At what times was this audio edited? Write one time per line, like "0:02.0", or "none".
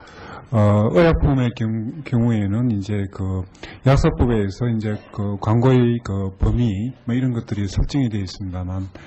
0:04.6